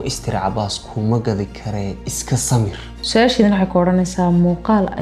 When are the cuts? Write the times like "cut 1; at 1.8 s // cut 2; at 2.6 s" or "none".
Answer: cut 1; at 3.0 s